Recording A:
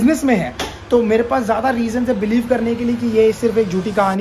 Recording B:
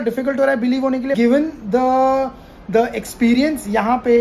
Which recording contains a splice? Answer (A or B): B